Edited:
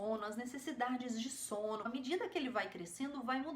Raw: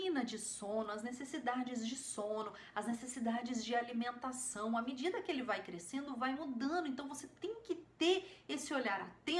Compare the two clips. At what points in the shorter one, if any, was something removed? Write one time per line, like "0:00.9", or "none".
0:01.9